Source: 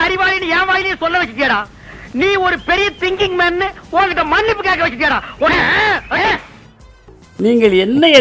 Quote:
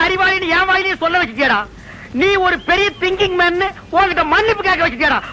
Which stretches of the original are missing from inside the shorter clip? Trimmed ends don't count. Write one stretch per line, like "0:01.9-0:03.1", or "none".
none